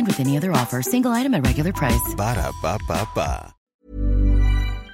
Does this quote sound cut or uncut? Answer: cut